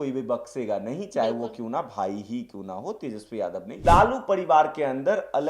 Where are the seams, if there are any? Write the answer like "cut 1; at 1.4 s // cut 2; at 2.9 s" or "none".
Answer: cut 1; at 3.7 s